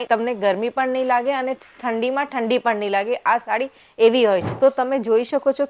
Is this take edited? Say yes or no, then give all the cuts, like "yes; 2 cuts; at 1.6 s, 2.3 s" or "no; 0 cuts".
yes; 1 cut; at 4.5 s